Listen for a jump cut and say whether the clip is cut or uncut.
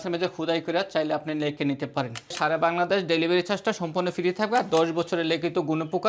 cut